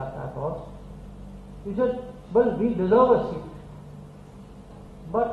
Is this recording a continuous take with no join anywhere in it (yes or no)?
yes